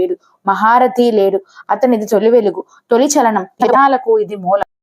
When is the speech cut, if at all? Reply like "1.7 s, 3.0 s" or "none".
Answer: 3.5 s